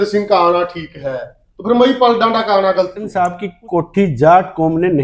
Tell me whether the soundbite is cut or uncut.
cut